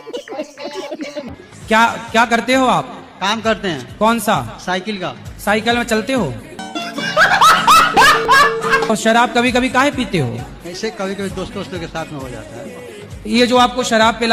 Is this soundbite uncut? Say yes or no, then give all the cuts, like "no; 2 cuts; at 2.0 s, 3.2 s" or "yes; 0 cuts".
no; 1 cut; at 1.2 s